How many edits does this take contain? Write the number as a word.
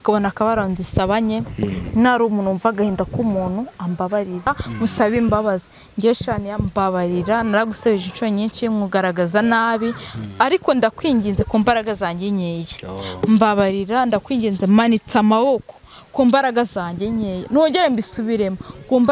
one